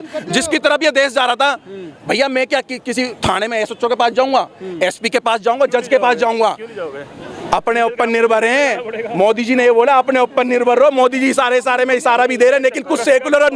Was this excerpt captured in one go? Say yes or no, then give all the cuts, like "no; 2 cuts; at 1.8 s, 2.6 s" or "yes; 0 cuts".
yes; 0 cuts